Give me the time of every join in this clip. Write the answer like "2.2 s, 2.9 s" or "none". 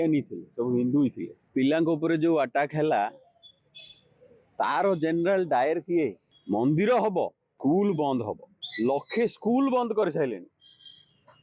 1.3 s, 6.3 s

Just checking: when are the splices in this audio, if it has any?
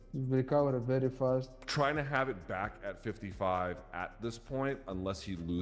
1.6 s

